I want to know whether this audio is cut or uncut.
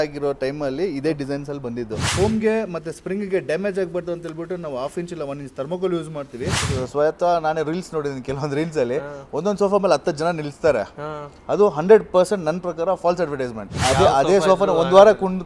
cut